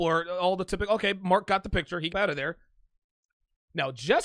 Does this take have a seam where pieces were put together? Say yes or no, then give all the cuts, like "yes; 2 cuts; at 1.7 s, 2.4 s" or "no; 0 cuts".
yes; 1 cut; at 2.1 s